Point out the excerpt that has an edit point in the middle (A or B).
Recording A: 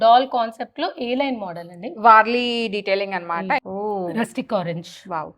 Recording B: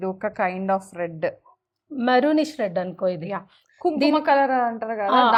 A